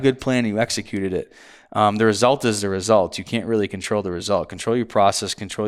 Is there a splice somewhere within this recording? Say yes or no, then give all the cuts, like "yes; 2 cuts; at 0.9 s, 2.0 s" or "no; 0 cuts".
no; 0 cuts